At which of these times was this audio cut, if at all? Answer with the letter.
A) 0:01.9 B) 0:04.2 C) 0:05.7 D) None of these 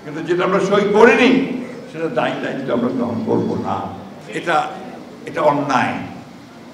B